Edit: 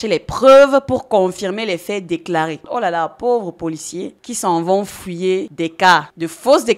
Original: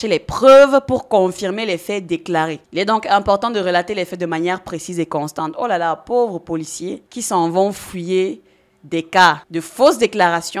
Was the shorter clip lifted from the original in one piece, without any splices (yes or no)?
no